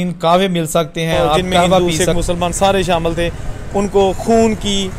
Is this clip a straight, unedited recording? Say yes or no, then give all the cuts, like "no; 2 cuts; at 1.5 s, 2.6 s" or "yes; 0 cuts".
no; 1 cut; at 1.8 s